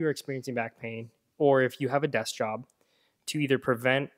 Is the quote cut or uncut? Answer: uncut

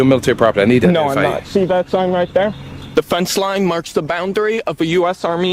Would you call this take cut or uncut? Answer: uncut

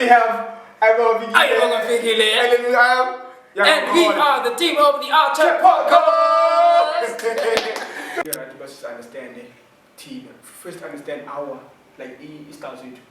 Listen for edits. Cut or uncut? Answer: cut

